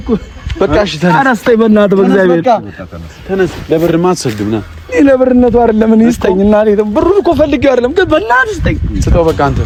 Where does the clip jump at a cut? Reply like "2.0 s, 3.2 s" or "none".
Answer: none

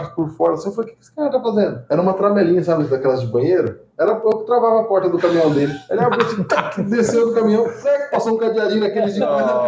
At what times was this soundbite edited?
none

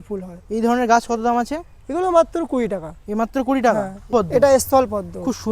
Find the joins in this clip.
4.1 s

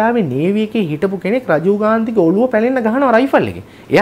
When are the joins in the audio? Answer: none

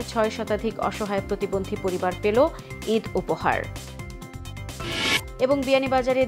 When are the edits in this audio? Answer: none

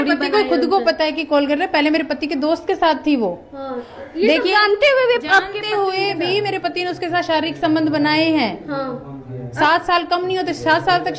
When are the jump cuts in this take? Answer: none

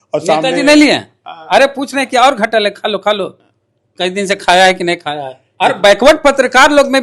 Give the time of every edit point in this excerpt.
5.4 s

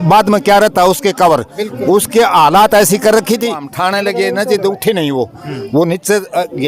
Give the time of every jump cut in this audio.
3.7 s

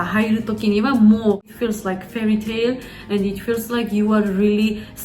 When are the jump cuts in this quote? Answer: 1.5 s

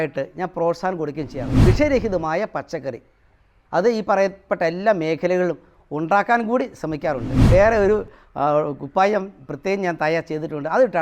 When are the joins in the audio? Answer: 1.6 s, 7.3 s

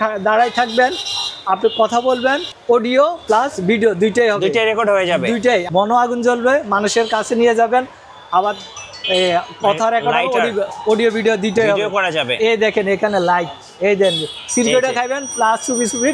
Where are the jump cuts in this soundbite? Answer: 5.6 s

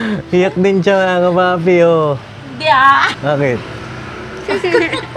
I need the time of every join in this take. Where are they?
3.1 s

